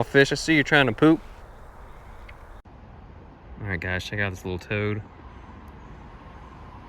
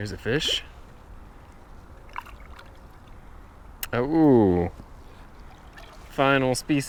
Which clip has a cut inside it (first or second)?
first